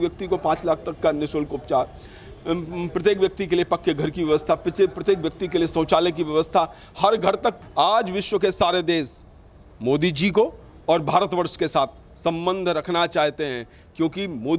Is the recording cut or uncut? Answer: cut